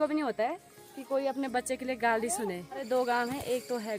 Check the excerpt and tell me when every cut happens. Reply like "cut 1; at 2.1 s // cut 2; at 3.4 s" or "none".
cut 1; at 2.9 s